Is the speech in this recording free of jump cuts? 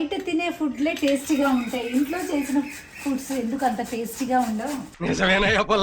no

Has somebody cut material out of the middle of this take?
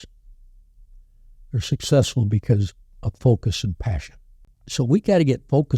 yes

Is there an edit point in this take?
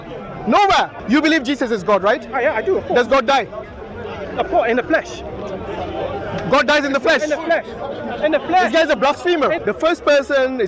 yes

